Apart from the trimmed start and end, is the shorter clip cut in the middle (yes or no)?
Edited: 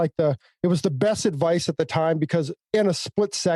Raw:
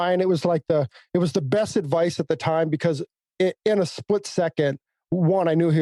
yes